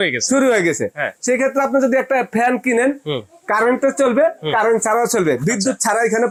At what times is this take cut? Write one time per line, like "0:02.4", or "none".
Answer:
none